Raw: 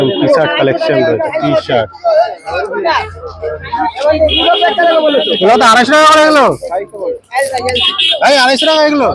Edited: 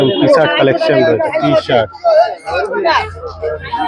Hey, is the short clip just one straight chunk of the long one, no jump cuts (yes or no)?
yes